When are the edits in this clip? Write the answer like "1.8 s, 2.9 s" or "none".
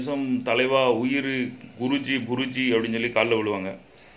none